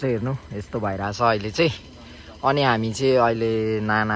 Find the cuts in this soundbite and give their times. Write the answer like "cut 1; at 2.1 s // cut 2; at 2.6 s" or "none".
none